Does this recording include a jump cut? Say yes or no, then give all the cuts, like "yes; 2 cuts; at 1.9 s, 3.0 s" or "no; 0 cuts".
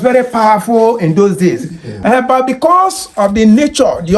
yes; 1 cut; at 1.9 s